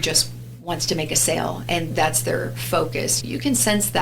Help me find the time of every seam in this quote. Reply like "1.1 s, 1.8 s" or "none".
1.9 s, 3.2 s